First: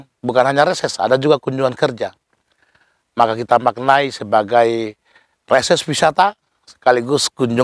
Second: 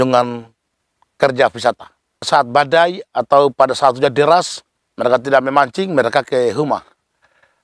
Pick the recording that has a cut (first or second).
second